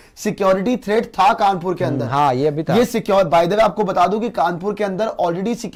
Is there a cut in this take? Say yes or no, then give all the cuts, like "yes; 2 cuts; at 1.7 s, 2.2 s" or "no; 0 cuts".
no; 0 cuts